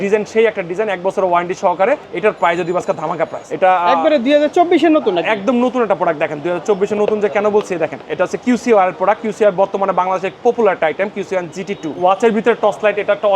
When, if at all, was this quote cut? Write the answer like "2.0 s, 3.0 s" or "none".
2.1 s, 3.4 s, 8.0 s, 11.9 s